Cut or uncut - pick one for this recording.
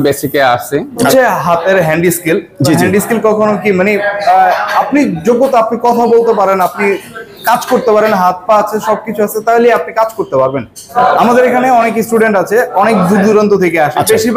cut